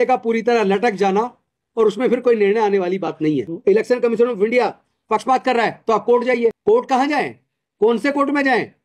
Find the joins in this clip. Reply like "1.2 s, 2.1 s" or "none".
3.5 s, 6.6 s